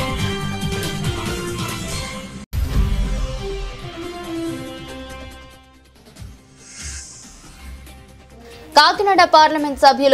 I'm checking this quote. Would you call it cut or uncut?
cut